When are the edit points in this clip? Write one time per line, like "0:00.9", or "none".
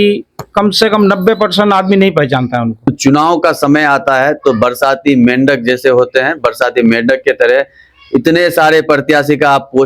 0:02.9